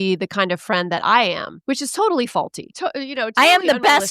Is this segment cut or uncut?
cut